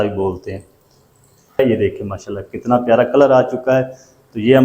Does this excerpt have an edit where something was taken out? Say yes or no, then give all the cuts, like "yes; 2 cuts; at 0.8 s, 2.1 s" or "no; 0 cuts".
yes; 1 cut; at 1.6 s